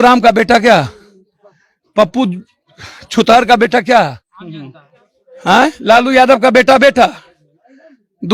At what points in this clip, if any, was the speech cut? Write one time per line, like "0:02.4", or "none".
none

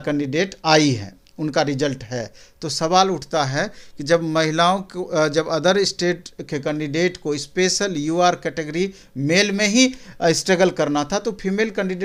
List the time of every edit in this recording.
none

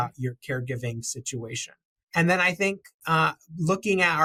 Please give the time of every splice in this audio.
none

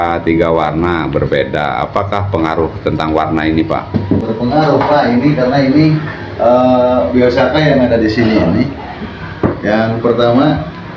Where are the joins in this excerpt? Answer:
0:04.2

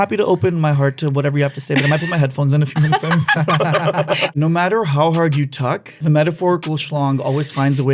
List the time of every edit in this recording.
0:04.3
0:05.9

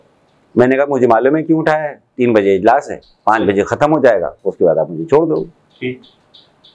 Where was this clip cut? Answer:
none

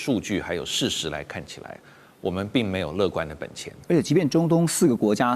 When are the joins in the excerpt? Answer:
none

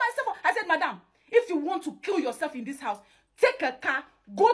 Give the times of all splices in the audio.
none

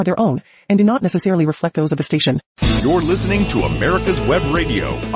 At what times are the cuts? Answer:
0:02.5

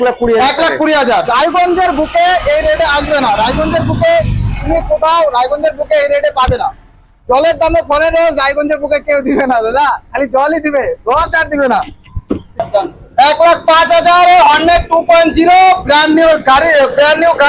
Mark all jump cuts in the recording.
0:01.3
0:12.6

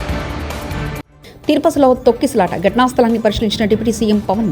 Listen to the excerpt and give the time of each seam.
0:01.0

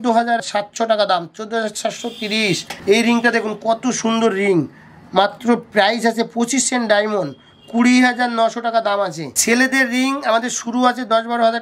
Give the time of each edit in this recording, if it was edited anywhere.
none

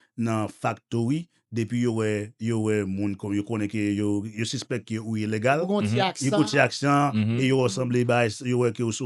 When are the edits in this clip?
none

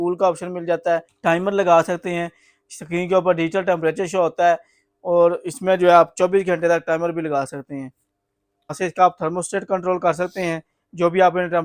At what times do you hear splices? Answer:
0:01.1
0:08.8

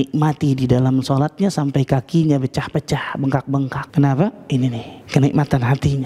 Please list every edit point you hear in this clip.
0:03.8
0:04.9

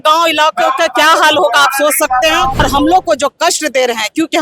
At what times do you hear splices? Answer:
0:02.6

